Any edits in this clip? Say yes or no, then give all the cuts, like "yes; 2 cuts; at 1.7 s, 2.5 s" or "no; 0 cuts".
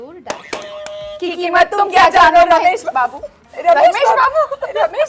no; 0 cuts